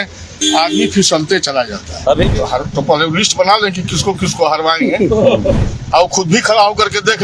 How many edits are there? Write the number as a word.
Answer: one